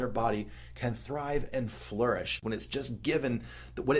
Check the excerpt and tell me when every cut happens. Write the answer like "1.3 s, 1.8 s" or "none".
2.4 s